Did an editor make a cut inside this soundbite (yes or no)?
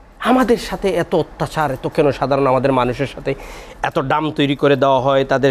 no